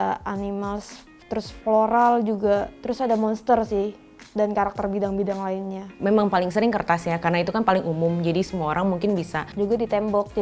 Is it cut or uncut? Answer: cut